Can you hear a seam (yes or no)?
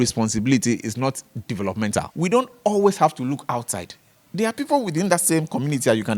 yes